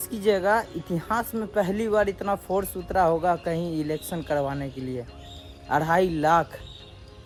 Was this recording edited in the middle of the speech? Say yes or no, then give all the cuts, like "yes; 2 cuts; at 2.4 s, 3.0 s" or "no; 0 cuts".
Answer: no; 0 cuts